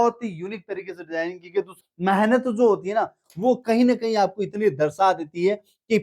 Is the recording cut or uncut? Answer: cut